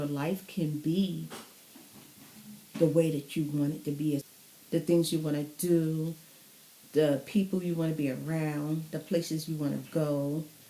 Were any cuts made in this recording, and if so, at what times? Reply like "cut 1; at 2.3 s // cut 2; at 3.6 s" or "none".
cut 1; at 4.3 s